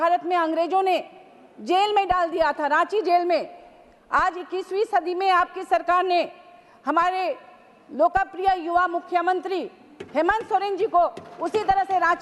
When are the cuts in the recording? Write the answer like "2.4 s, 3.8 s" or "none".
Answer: none

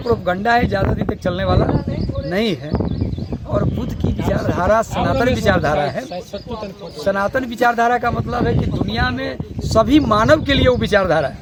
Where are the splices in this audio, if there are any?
none

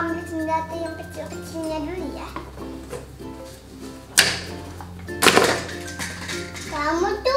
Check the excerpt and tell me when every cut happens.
none

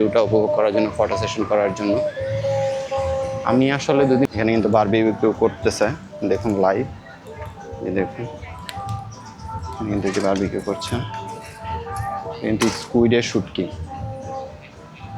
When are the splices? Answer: 4.2 s

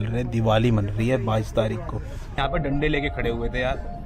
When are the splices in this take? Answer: 2.4 s

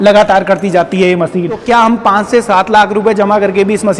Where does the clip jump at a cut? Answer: 1.6 s

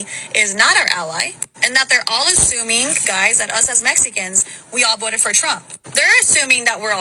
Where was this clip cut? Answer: none

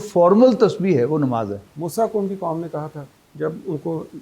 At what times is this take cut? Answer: 1.7 s

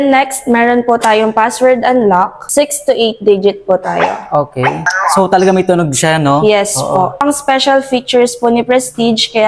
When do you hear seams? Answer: 2.4 s, 4.9 s, 7.2 s

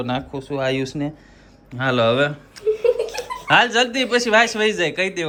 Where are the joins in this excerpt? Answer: none

